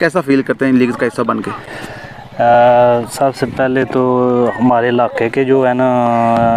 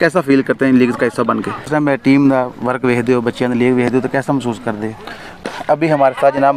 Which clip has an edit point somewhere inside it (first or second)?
second